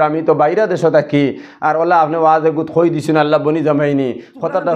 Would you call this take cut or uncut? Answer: uncut